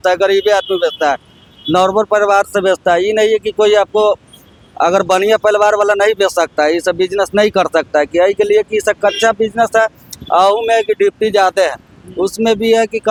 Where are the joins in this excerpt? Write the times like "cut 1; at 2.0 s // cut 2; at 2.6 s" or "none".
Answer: none